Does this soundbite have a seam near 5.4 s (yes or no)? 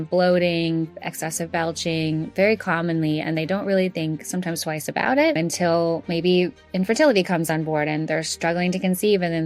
yes